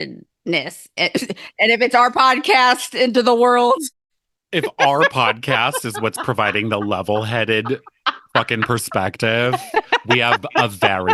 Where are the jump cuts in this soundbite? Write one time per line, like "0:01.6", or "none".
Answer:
none